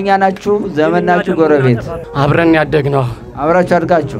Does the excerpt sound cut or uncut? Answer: cut